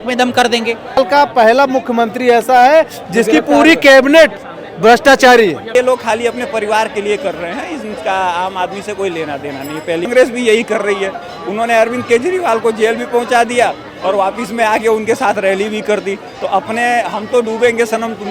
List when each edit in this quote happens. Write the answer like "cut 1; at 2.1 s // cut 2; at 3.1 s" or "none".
cut 1; at 1.0 s // cut 2; at 5.7 s // cut 3; at 10.1 s